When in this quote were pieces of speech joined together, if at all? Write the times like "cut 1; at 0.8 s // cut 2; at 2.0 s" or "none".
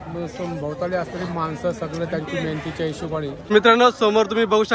cut 1; at 3.5 s